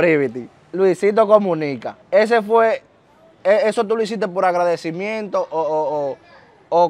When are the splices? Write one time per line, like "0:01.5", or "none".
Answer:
0:01.9